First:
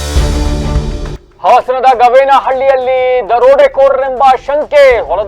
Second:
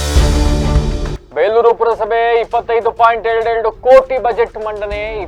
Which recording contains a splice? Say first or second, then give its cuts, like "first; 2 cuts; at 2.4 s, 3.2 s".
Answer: first; 1 cut; at 1.2 s